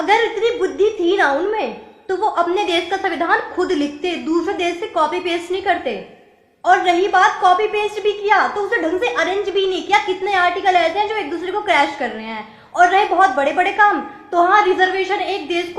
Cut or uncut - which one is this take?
uncut